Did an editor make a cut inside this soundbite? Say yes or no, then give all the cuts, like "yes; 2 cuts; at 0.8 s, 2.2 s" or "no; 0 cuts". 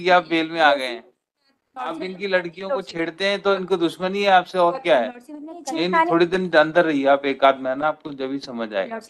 yes; 2 cuts; at 2.0 s, 5.5 s